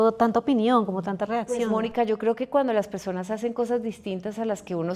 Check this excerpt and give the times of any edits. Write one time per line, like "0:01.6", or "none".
none